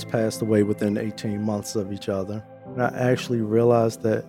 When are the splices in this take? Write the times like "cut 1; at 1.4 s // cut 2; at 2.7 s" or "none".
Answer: cut 1; at 2.8 s